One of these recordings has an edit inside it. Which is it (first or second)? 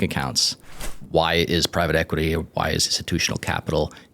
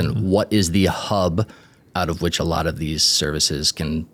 first